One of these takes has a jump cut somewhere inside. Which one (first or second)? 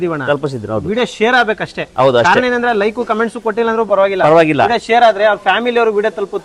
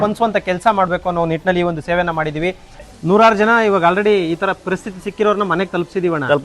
second